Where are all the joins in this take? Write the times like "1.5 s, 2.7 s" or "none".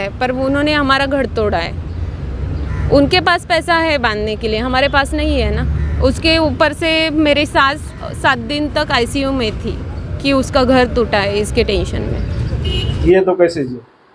13.0 s